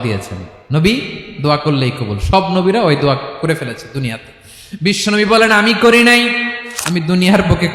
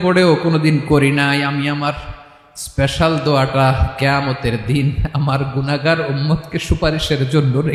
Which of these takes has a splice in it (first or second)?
first